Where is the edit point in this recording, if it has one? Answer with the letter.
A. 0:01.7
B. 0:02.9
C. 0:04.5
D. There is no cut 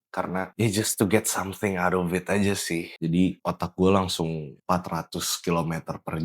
B